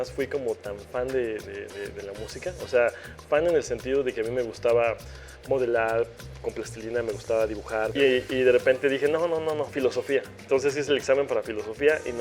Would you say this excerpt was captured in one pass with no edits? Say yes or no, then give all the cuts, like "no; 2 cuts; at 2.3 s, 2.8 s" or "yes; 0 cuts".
no; 1 cut; at 7.9 s